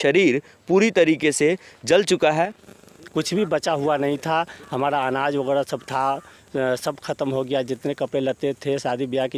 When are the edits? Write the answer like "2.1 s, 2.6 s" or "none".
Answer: 2.7 s